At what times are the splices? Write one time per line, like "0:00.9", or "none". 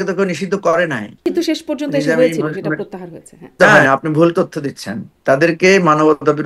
0:01.2
0:03.6